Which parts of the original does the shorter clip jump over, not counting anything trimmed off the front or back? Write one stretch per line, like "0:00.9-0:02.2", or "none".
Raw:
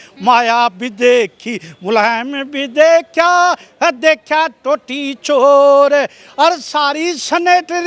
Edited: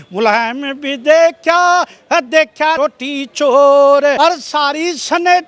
0:04.5-0:04.6
0:06.0-0:06.4